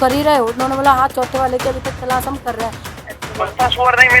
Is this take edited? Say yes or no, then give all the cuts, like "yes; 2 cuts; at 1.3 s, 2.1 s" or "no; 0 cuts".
yes; 1 cut; at 2.9 s